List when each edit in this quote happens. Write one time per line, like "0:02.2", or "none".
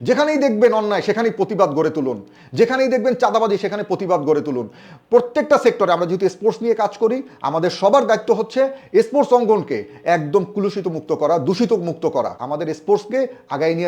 0:12.4

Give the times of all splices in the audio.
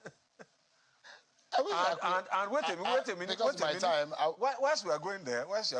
none

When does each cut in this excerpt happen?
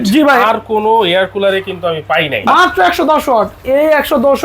0:02.5

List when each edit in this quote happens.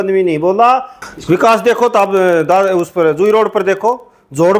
0:00.9

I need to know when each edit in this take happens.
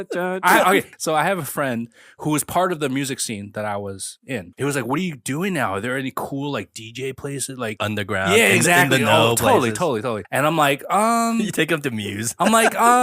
0:00.9
0:02.0
0:04.5
0:07.8
0:10.2

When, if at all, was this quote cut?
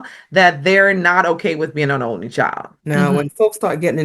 0:02.7

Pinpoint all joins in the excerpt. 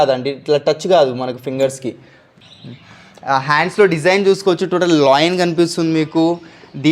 0:02.4

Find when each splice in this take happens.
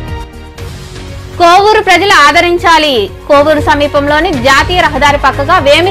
0:01.4

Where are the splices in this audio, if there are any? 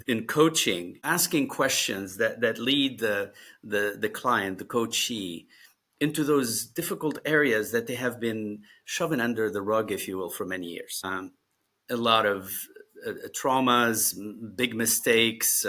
0:01.0
0:11.0

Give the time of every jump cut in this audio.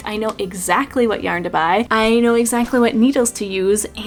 none

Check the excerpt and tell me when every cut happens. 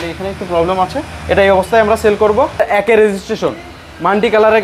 0:02.6

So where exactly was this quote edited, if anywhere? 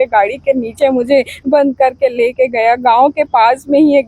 none

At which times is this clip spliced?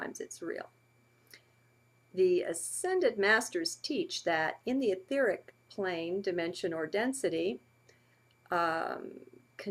0:06.1

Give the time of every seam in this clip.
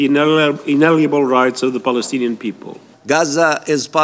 0:02.9

